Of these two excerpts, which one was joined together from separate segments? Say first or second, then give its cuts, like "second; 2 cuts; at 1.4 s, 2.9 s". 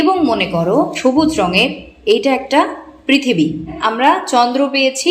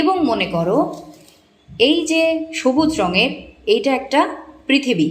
first; 2 cuts; at 0.9 s, 3.8 s